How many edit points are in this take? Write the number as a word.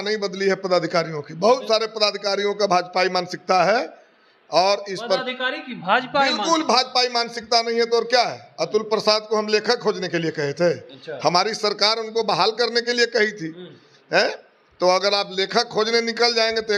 zero